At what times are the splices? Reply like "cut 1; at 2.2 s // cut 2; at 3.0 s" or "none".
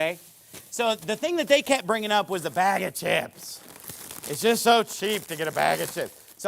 cut 1; at 2.3 s